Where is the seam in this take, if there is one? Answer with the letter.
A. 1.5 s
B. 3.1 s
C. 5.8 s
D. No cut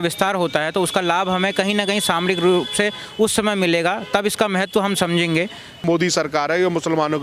C